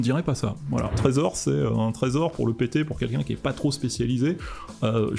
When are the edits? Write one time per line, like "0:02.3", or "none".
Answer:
0:01.0